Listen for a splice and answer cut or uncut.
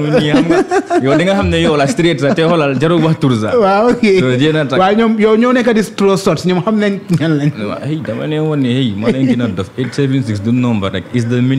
uncut